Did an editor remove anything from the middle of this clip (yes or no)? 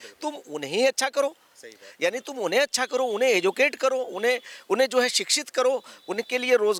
no